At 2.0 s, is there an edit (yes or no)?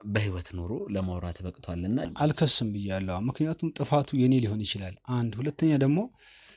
yes